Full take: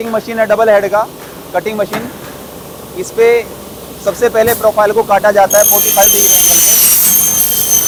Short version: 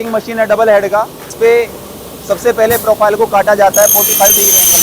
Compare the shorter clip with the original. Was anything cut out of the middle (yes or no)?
yes